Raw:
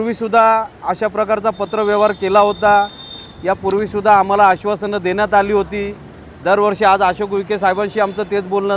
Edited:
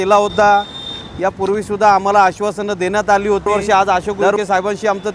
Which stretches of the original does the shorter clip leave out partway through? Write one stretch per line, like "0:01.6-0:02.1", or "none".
0:05.7-0:06.6

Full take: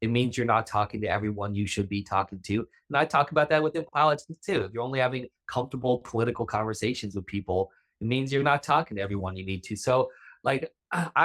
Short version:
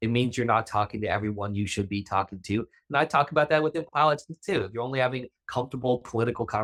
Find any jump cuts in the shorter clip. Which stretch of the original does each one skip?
none

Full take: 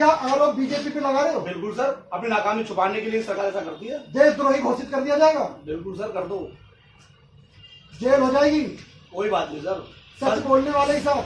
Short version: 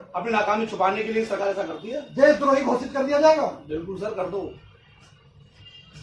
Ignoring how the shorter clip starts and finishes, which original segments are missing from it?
none

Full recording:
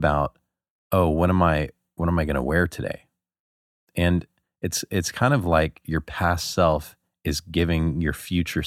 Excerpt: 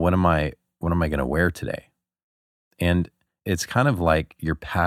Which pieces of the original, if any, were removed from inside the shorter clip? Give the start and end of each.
0:04.5-0:04.8

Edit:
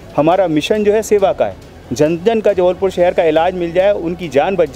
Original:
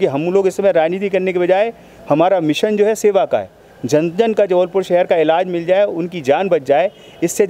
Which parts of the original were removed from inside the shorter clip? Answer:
none

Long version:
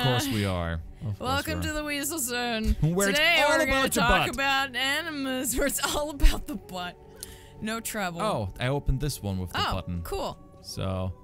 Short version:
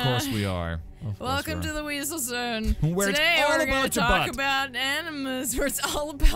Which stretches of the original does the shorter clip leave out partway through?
none

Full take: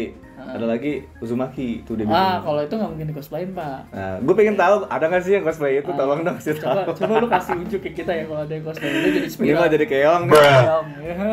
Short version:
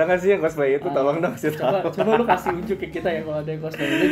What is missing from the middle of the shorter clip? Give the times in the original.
none

